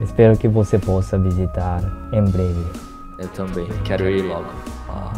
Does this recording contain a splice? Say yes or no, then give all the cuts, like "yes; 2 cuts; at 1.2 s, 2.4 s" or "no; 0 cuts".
no; 0 cuts